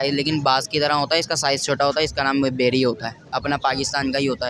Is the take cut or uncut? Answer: uncut